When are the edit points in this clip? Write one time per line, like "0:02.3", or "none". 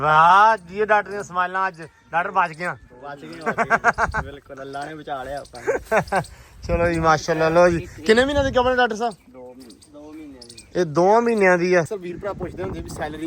0:11.9